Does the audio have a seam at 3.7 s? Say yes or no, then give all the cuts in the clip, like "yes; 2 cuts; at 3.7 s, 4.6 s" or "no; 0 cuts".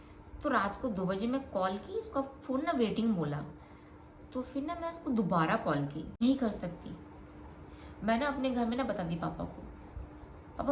no; 1 cut; at 6.0 s